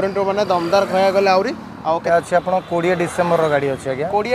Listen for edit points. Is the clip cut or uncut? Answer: cut